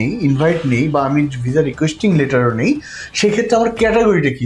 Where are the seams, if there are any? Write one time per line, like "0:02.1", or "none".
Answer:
none